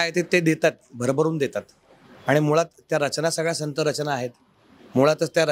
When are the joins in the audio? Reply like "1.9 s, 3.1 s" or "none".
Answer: none